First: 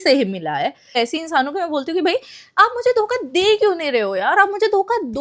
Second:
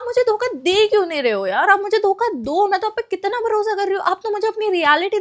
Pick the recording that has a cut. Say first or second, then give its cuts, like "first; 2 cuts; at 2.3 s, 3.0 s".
first; 1 cut; at 1.0 s